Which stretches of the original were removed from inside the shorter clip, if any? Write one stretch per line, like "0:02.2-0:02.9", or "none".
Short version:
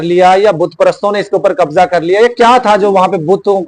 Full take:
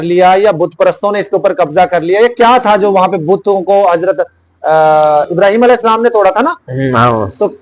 none